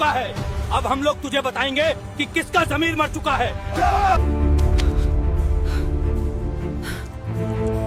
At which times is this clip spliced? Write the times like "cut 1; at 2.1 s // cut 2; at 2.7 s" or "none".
none